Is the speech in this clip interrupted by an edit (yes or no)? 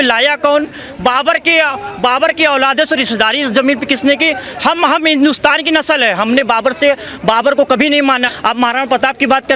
yes